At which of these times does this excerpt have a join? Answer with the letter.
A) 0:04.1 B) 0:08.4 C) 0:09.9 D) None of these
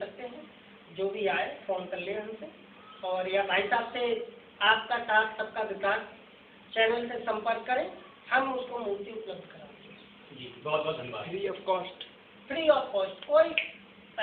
D